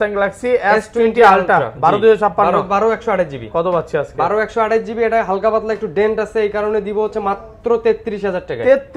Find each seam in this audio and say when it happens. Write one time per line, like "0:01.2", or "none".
none

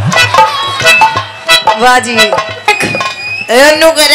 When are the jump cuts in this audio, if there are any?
0:02.7

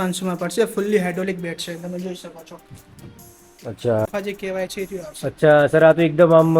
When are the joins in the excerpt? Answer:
0:04.1

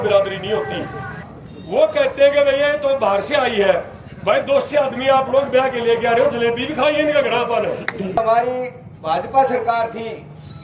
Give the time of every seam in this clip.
0:01.2
0:08.2

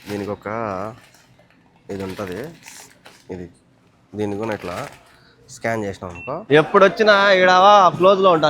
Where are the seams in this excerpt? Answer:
0:06.4

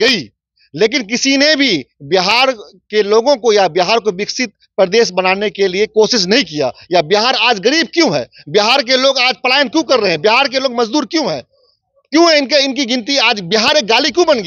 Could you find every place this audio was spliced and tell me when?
none

